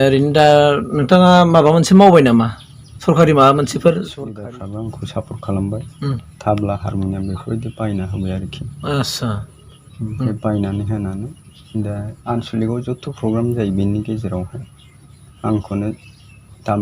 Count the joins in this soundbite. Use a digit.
1